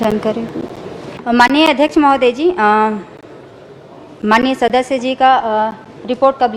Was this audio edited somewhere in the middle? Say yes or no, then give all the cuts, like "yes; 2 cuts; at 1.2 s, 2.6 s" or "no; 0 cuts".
yes; 1 cut; at 1.0 s